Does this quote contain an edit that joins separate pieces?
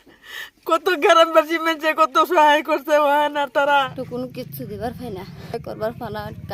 yes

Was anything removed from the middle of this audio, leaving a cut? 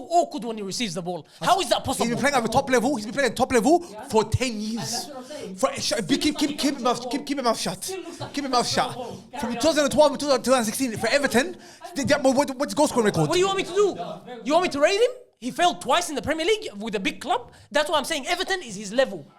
yes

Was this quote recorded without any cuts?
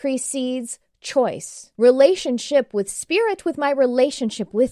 no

